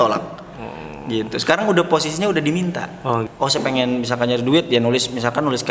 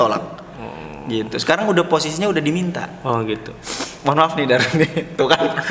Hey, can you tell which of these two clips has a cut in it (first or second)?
first